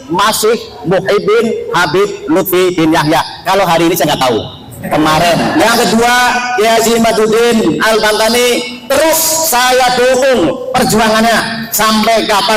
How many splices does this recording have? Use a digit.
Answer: 1